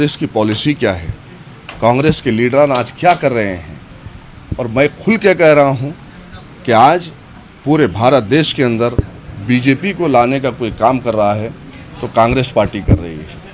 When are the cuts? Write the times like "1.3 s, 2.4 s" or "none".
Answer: none